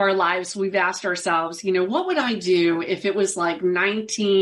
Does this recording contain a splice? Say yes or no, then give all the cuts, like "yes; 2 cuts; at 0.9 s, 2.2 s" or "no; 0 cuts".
no; 0 cuts